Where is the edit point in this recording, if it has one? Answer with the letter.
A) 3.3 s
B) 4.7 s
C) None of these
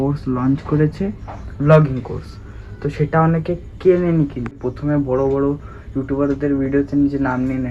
B